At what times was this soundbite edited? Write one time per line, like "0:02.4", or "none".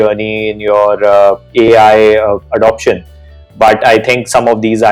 none